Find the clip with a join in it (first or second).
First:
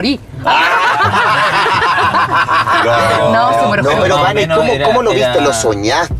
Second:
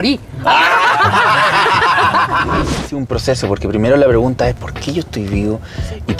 second